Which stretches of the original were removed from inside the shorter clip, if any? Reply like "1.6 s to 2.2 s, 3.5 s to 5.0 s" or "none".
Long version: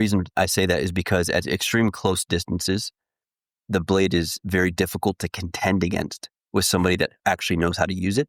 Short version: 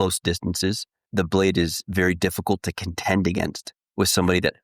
3.0 s to 3.5 s